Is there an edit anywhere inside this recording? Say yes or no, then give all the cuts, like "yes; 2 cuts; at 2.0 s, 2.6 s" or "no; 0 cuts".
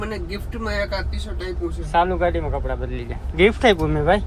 no; 0 cuts